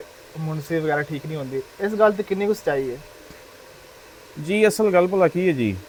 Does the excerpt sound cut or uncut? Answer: uncut